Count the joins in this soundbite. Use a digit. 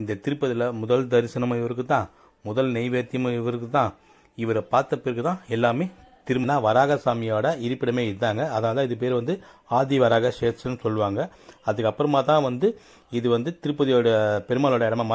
1